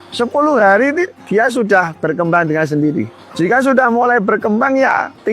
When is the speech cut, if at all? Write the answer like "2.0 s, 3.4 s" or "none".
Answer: 3.2 s